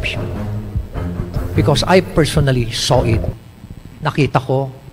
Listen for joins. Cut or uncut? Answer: cut